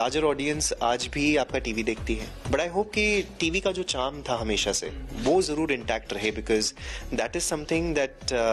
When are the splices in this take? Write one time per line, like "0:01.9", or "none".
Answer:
0:02.3

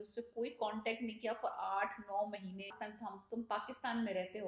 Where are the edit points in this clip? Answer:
0:02.7

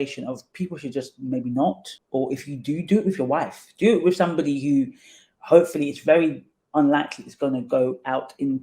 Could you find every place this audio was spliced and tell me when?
0:01.9

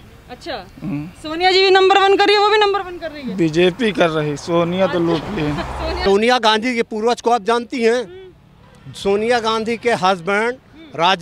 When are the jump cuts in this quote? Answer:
0:05.9

